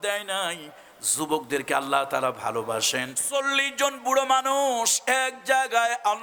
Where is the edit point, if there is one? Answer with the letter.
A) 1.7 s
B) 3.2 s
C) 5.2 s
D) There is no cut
B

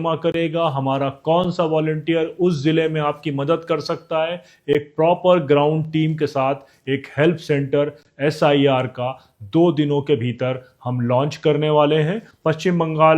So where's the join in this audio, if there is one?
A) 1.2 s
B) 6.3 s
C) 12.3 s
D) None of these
C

